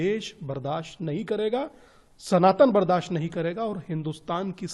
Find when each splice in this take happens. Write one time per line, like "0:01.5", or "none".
none